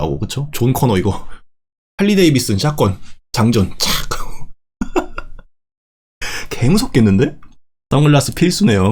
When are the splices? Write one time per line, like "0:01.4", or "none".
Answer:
none